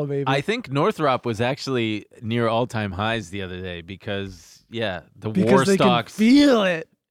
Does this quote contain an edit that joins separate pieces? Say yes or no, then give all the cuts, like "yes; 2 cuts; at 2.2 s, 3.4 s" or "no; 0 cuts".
no; 0 cuts